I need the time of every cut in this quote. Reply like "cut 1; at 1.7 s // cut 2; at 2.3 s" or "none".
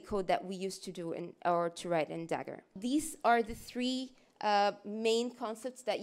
cut 1; at 2.8 s